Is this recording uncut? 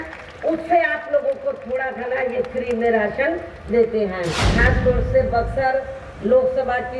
no; 1 cut; at 4.4 s

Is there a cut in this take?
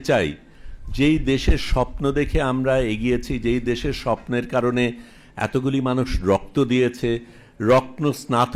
no; 0 cuts

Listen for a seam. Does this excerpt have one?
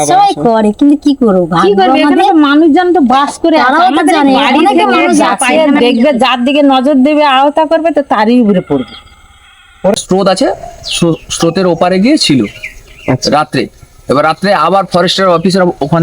yes; 2 cuts; at 5.4 s, 10.0 s

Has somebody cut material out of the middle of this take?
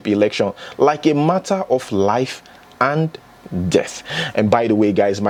no; 0 cuts

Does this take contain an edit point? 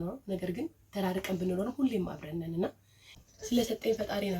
yes; 1 cut; at 3.1 s

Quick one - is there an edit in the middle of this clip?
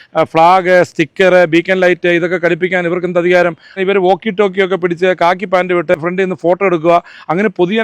yes; 2 cuts; at 3.8 s, 5.9 s

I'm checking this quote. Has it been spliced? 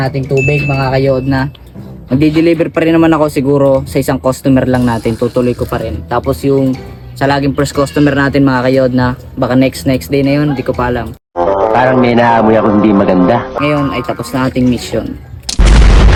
no; 0 cuts

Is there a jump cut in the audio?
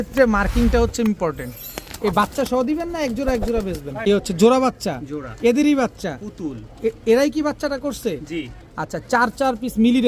yes; 2 cuts; at 4.1 s, 8.6 s

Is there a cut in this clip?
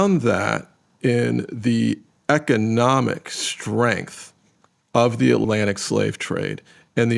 yes; 1 cut; at 5.4 s

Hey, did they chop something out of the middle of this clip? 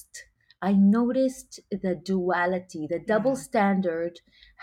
no; 0 cuts

